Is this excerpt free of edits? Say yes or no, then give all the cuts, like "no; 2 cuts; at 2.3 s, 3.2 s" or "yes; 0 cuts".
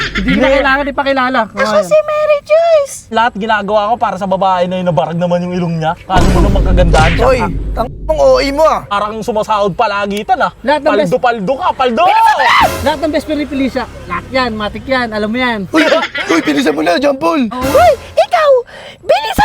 no; 3 cuts; at 3.1 s, 8.9 s, 17.5 s